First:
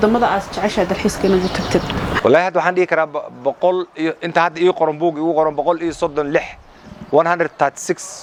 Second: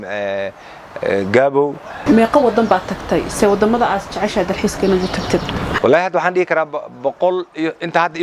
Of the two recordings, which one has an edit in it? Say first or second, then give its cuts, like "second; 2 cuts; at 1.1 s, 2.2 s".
second; 1 cut; at 2.0 s